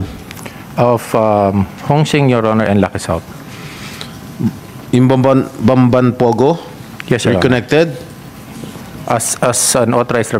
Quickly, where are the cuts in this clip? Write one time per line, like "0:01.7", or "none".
none